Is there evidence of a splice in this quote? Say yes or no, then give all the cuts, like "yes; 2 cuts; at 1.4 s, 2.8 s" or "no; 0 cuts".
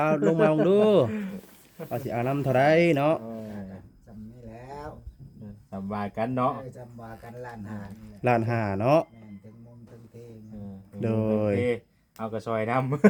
no; 0 cuts